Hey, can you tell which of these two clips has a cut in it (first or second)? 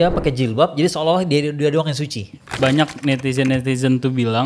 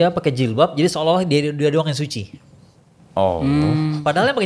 first